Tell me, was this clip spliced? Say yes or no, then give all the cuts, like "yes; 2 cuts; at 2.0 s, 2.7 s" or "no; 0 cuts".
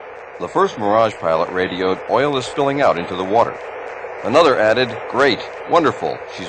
yes; 1 cut; at 2.2 s